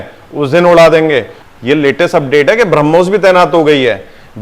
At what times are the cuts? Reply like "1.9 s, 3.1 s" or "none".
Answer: 1.4 s